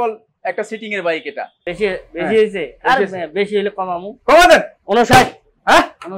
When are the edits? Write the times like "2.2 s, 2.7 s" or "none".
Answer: 1.5 s